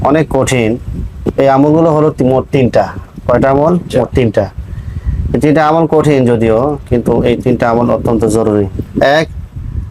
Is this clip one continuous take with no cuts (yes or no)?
no